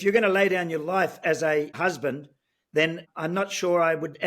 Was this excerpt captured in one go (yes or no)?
no